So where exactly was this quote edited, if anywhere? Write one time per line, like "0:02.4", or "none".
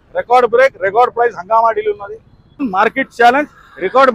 0:02.6